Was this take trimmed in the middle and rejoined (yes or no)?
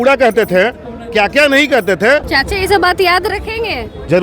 yes